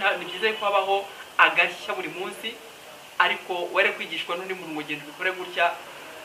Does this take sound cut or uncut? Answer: cut